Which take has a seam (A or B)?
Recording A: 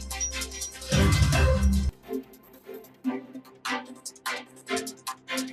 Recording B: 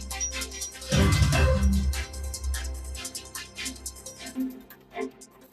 A